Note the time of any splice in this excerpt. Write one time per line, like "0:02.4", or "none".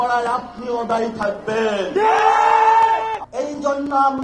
0:03.2